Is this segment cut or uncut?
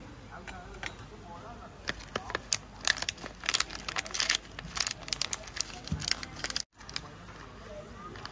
cut